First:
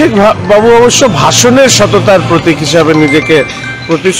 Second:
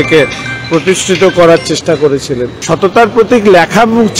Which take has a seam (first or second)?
second